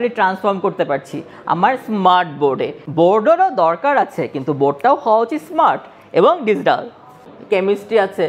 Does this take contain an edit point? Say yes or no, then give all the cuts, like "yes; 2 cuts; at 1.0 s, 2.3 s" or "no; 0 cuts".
yes; 2 cuts; at 2.8 s, 7.2 s